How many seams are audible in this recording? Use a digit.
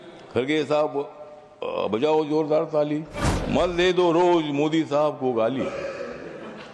1